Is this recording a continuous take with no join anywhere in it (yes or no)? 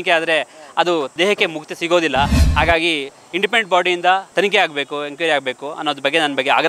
no